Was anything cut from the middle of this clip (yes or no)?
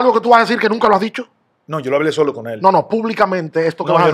no